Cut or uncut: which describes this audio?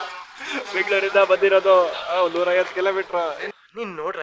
uncut